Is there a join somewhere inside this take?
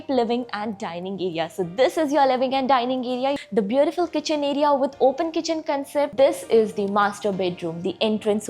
yes; 2 cuts; at 3.4 s, 6.1 s

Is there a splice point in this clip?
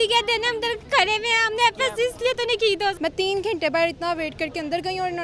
yes; 1 cut; at 3.0 s

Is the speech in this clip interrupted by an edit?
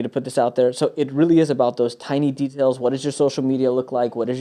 no; 0 cuts

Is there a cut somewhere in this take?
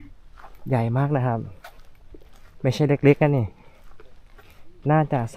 no; 0 cuts

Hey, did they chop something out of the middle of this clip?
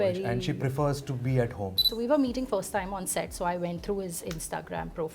yes; 1 cut; at 1.8 s

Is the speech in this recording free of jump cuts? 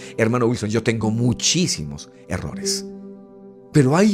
yes; 0 cuts

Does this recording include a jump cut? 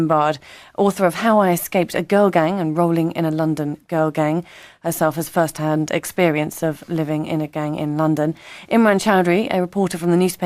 yes; 1 cut; at 7.3 s

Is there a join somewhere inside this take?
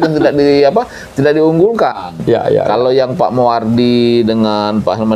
no; 0 cuts

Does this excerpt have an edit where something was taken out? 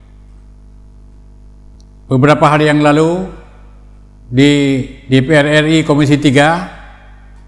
yes; 1 cut; at 1.7 s

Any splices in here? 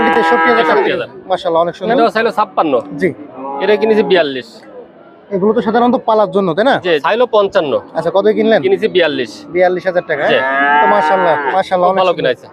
yes; 2 cuts; at 1.9 s, 7.0 s

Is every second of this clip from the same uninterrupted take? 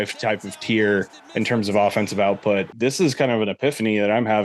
no; 1 cut; at 2.7 s

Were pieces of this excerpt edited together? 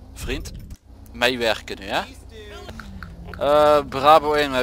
yes; 1 cut; at 2.7 s

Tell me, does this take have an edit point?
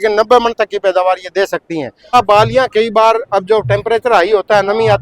yes; 1 cut; at 2.1 s

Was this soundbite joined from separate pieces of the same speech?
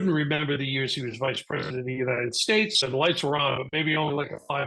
yes; 1 cut; at 2.8 s

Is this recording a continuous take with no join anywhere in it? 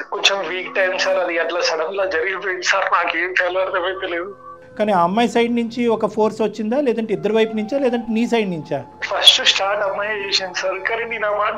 yes; 0 cuts

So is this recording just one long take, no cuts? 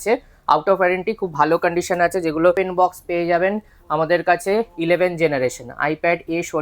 no; 1 cut; at 2.5 s

